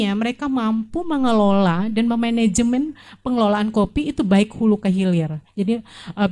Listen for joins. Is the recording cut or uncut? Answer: uncut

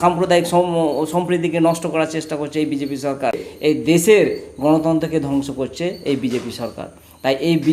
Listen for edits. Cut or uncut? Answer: cut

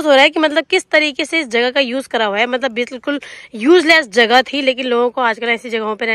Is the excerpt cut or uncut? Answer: uncut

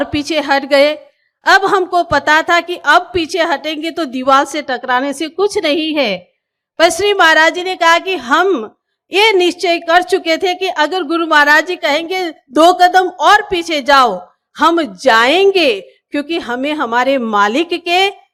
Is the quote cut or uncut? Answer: uncut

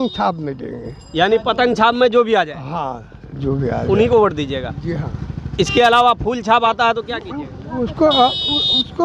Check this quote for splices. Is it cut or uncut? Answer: uncut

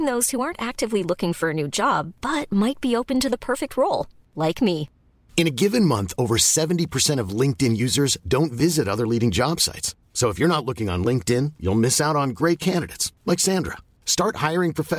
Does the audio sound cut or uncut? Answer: uncut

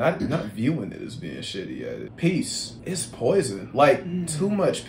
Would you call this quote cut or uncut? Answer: cut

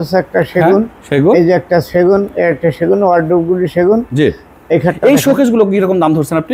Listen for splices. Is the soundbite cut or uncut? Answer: uncut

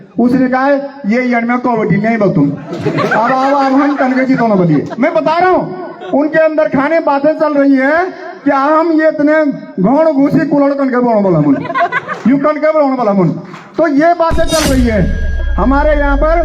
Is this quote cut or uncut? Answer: cut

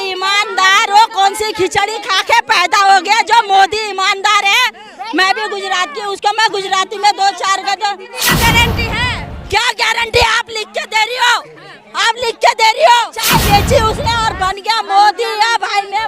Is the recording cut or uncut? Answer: cut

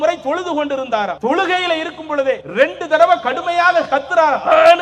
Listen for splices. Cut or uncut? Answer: cut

